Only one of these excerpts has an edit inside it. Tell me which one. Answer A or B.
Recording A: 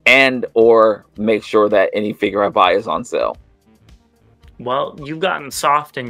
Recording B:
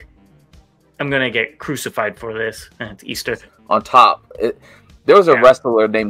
B